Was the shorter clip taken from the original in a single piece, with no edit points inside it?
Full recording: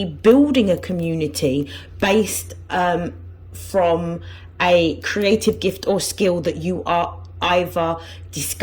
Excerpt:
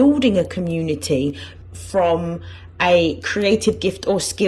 no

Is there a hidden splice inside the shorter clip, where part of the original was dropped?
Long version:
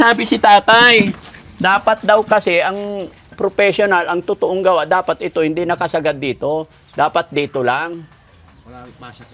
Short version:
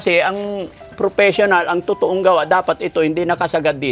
no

